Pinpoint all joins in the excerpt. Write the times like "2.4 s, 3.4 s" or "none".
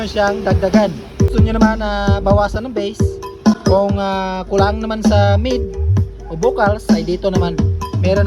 1.3 s, 3.6 s